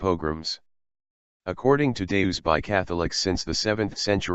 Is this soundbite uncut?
yes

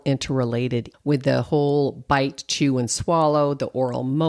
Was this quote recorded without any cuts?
no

